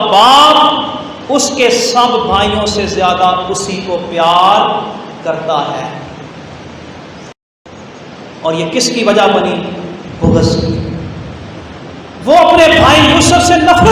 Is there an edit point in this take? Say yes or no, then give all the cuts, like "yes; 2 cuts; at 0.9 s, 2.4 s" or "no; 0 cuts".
yes; 1 cut; at 7.7 s